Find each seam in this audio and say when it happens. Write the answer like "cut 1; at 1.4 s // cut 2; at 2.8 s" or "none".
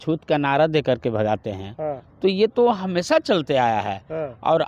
none